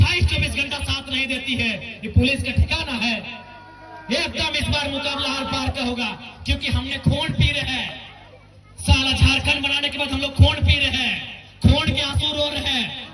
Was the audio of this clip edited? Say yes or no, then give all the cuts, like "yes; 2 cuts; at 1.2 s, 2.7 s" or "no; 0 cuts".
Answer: no; 0 cuts